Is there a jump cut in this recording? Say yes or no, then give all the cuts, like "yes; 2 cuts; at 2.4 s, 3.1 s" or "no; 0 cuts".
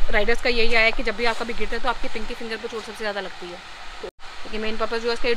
yes; 1 cut; at 4.2 s